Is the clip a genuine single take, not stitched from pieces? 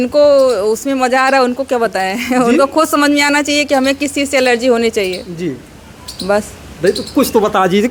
yes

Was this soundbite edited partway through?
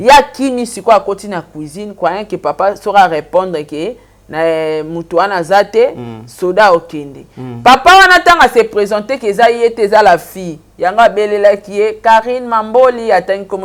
no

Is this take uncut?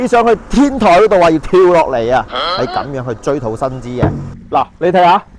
no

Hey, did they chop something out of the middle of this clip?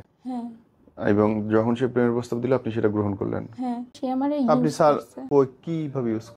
yes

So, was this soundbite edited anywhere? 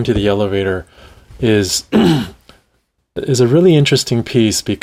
no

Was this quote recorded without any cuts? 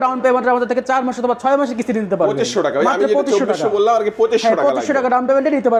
yes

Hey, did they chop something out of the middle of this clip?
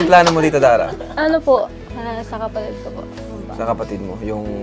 no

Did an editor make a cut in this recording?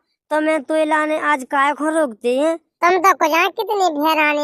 yes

